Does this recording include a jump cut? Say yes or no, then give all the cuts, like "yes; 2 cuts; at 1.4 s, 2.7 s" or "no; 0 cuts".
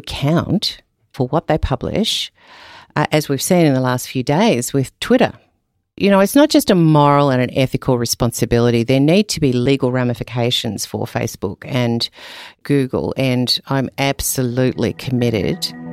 yes; 2 cuts; at 1.1 s, 5.9 s